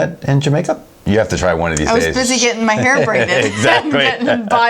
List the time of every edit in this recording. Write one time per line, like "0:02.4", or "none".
0:00.9